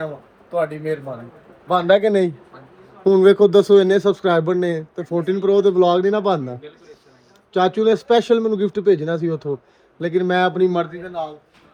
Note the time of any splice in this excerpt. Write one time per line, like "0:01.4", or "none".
none